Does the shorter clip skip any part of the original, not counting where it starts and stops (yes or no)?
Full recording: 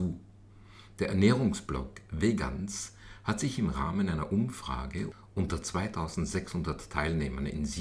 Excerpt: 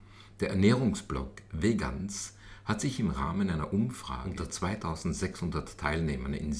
yes